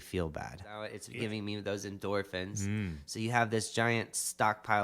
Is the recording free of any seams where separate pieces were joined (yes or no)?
no